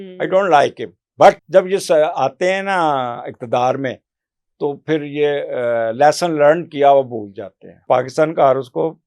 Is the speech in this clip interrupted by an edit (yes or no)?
yes